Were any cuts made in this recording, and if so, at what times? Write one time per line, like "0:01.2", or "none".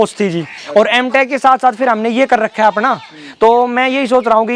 none